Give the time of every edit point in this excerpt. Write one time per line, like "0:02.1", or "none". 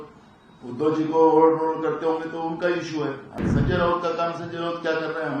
0:03.3